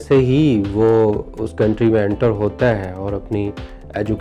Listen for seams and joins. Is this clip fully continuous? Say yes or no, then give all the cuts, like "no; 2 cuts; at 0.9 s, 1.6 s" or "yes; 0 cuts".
yes; 0 cuts